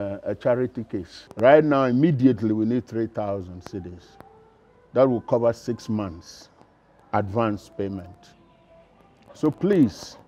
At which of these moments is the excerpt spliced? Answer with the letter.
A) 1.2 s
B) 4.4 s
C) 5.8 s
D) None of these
A